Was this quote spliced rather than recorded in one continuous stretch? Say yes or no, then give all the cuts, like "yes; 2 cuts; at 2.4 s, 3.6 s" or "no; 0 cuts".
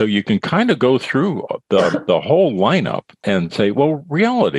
yes; 1 cut; at 3.2 s